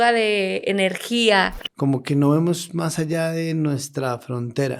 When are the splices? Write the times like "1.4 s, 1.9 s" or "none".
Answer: 1.6 s